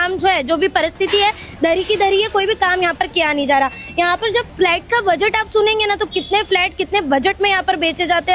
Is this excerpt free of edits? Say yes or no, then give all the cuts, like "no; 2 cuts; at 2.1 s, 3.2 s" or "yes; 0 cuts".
yes; 0 cuts